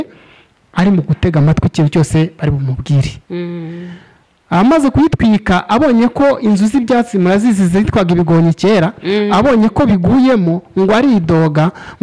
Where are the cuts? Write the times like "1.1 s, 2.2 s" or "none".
none